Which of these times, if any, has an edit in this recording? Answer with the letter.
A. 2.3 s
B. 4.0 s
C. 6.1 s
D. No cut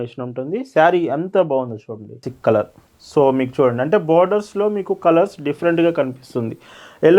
A